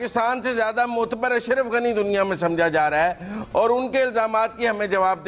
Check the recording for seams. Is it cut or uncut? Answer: uncut